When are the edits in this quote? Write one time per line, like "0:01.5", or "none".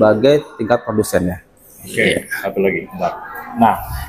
none